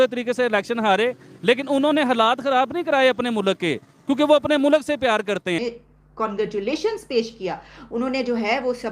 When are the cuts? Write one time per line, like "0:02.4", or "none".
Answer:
0:05.6